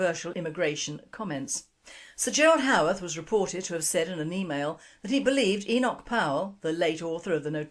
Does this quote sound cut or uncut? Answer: uncut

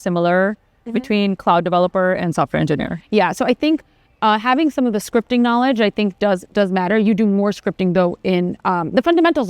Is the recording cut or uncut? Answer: uncut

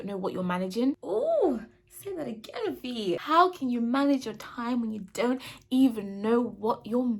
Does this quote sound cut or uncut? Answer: cut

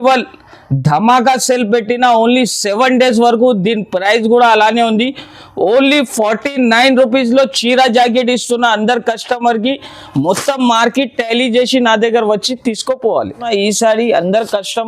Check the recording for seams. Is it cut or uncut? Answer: cut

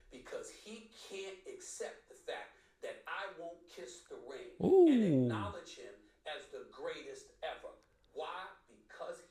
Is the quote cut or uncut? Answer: uncut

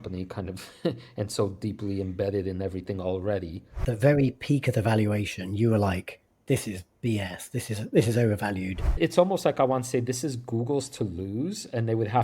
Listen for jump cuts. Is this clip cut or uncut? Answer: cut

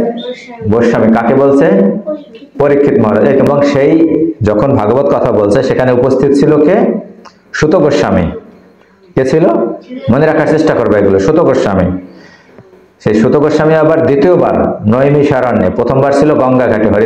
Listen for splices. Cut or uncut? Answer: cut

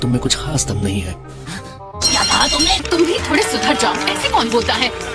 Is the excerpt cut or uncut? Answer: cut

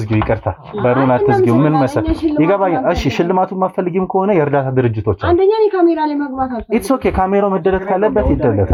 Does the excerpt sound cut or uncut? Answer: uncut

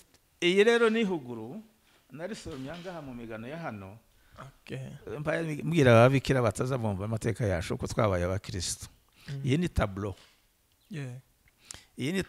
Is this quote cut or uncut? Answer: uncut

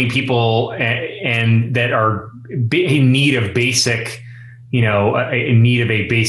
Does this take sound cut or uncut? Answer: uncut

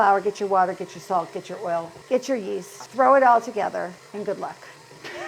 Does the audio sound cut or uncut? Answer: cut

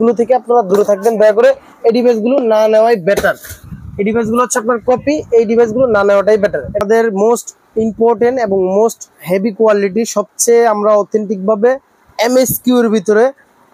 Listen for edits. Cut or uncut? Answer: cut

